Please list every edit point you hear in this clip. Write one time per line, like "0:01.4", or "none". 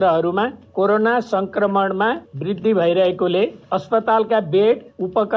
0:02.3